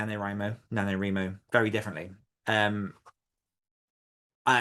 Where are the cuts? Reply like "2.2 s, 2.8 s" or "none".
2.3 s